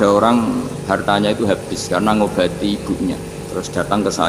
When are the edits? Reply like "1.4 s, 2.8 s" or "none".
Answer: 1.0 s, 3.3 s

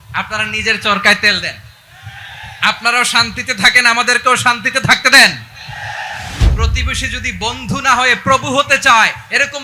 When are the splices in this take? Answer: 6.4 s

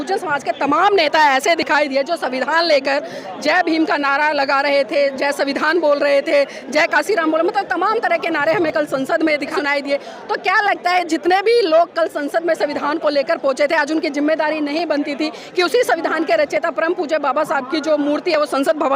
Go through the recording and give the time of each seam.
9.5 s

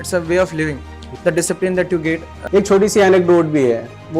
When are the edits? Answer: 1.1 s, 2.3 s

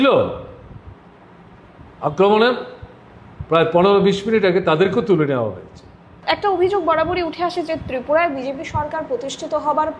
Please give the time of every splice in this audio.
6.2 s

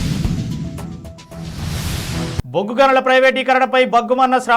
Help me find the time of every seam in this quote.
2.4 s

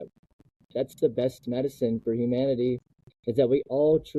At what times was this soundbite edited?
none

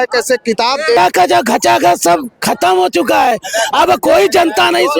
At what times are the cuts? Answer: 1.0 s

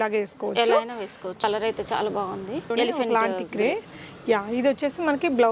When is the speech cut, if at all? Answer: 1.4 s, 2.7 s

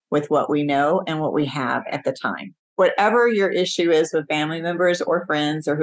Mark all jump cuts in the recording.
2.6 s

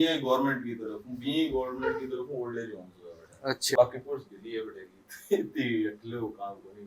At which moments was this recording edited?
3.8 s

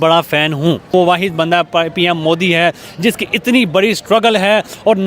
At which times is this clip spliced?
0.9 s

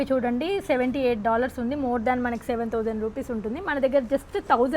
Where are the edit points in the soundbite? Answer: none

